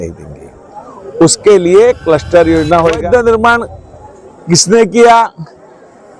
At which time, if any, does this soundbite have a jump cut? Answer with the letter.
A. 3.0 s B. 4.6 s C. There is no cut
A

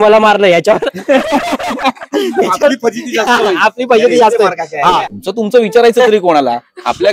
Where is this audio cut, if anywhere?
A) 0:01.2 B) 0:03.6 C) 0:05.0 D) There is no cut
C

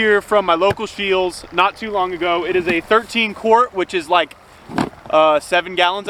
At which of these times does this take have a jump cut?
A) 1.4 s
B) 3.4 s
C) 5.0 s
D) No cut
D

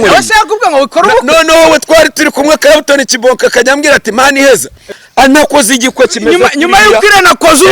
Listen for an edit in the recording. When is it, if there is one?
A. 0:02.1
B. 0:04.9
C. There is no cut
B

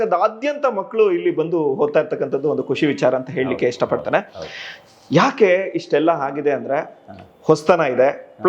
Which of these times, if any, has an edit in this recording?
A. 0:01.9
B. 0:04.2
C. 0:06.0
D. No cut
D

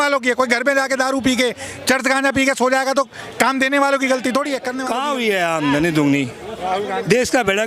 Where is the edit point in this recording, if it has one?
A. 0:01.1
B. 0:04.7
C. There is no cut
B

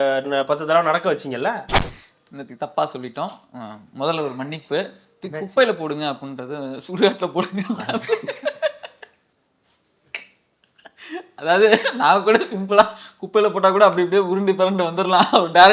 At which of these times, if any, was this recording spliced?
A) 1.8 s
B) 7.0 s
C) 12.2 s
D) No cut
A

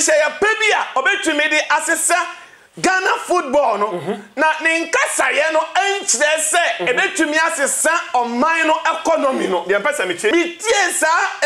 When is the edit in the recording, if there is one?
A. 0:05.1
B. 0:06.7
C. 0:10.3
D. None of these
C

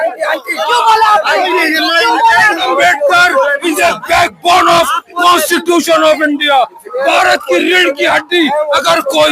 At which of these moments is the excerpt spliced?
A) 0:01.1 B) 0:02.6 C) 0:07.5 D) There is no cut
B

